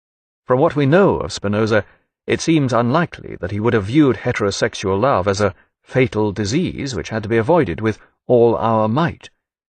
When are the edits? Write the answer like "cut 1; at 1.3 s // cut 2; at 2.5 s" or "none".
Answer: cut 1; at 7.5 s